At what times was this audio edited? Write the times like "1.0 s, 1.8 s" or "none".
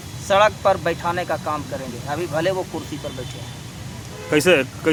none